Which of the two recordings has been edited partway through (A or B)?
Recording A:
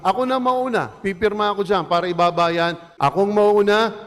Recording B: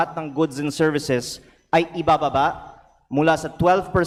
A